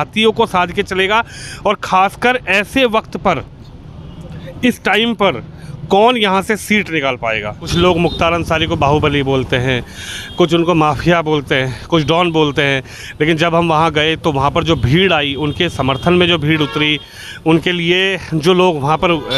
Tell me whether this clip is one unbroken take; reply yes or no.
no